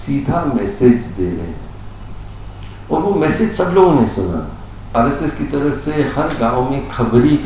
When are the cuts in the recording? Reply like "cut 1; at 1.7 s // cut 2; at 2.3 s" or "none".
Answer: cut 1; at 4.9 s